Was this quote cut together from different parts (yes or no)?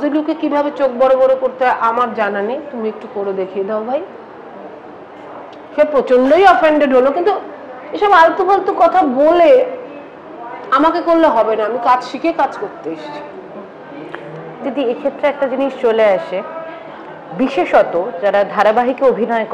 no